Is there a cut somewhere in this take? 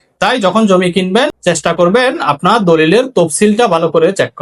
yes; 1 cut; at 1.4 s

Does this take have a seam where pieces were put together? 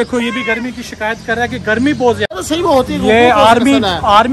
yes; 1 cut; at 2.3 s

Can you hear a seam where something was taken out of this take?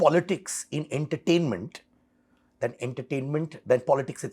no; 0 cuts

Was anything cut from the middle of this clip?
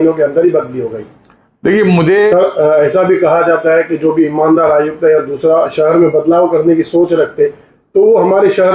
yes; 1 cut; at 2.3 s

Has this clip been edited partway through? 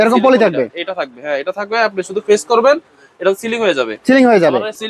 no; 0 cuts

